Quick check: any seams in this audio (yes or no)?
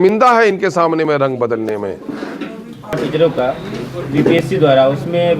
no